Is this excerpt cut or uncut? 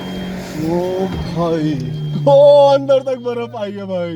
uncut